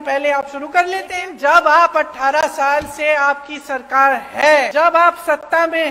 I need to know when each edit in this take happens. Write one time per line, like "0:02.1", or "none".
0:01.2
0:04.7